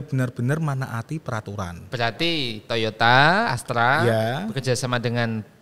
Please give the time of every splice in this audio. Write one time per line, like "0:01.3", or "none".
0:01.8

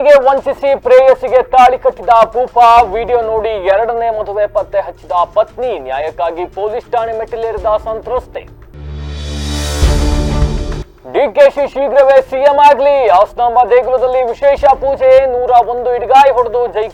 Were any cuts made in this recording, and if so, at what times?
none

